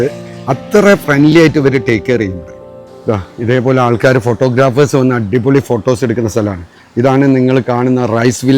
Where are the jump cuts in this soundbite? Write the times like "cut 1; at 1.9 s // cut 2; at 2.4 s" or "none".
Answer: cut 1; at 2.9 s